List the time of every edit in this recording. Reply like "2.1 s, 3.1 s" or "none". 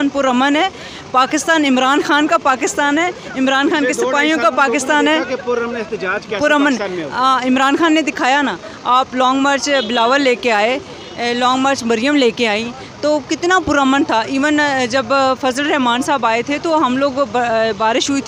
none